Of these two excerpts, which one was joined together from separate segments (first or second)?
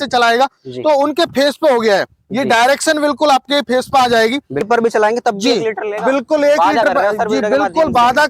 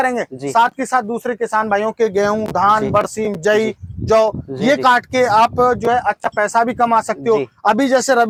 first